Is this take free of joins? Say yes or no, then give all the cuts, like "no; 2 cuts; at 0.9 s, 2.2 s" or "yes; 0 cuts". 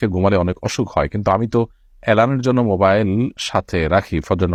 yes; 0 cuts